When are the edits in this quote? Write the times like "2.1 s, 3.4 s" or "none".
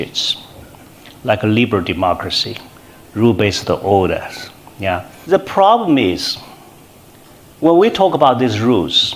5.1 s